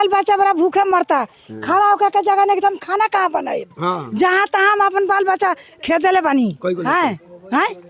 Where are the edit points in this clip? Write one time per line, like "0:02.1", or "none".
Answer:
none

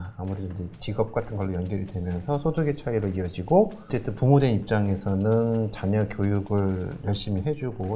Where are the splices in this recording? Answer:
0:03.9

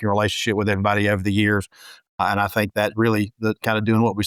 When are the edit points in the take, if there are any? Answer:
none

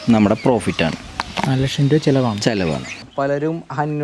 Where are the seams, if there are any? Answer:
0:03.0

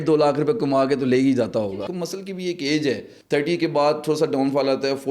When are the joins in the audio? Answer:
0:01.7
0:03.1

